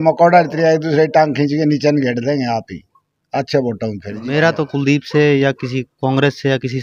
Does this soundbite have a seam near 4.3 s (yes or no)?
yes